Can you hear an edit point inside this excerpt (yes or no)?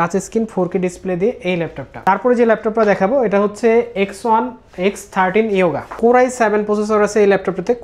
no